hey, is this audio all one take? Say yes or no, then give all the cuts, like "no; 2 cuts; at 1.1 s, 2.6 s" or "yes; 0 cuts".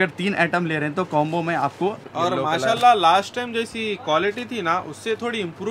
no; 1 cut; at 2.0 s